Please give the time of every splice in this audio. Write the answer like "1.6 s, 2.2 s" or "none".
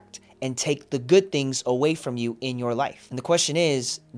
3.1 s